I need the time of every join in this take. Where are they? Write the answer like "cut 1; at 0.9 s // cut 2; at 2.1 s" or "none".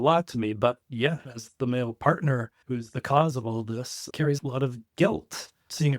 cut 1; at 2.5 s